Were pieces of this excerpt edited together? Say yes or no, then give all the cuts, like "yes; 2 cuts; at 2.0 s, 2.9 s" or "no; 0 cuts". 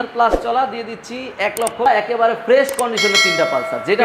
yes; 1 cut; at 1.9 s